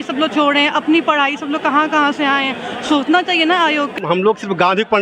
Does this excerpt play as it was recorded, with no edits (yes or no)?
no